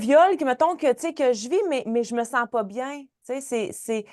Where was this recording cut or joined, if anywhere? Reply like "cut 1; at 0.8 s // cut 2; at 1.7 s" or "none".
none